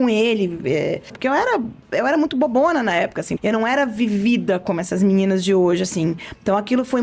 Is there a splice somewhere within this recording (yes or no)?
yes